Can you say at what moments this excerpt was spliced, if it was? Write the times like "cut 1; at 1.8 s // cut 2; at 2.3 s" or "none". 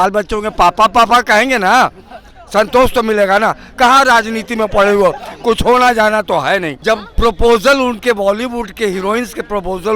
cut 1; at 6.7 s

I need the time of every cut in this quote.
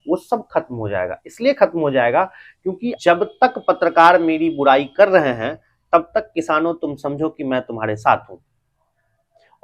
cut 1; at 2.9 s

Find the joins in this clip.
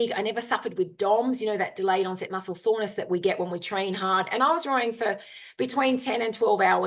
none

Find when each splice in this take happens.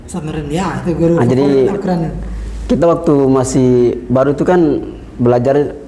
none

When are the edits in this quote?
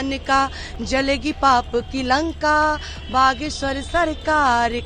none

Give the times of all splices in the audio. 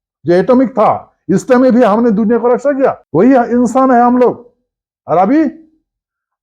cut 1; at 3.0 s

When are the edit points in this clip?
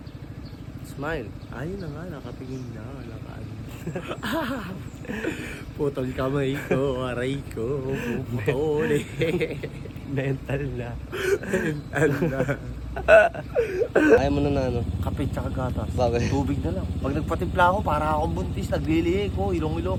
none

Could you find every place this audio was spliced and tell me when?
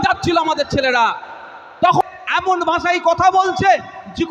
cut 1; at 1.9 s

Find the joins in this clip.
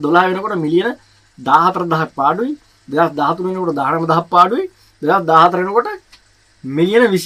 none

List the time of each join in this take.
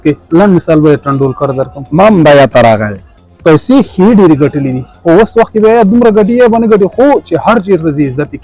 none

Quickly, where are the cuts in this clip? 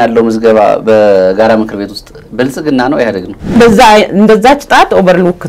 cut 1; at 3.6 s

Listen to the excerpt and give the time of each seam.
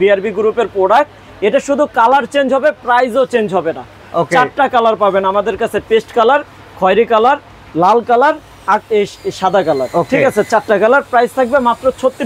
none

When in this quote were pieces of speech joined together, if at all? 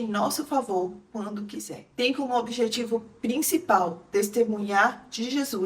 cut 1; at 1.8 s

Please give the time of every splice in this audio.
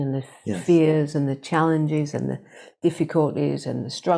none

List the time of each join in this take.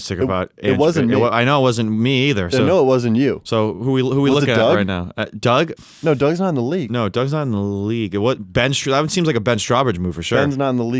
none

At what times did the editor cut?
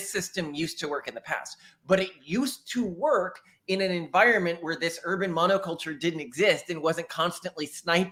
none

